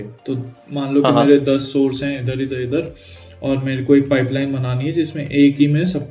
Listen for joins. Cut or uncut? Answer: uncut